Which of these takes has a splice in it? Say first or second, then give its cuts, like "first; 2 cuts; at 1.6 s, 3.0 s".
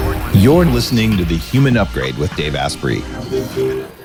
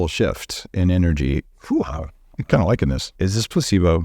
second; 2 cuts; at 1.6 s, 3.1 s